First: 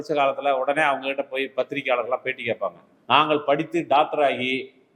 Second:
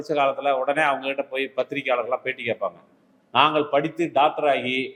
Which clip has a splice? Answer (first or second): first